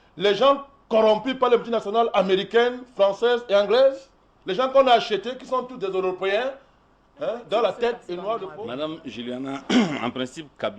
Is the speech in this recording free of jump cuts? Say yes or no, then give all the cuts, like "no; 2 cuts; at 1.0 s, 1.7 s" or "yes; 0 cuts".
no; 1 cut; at 8.5 s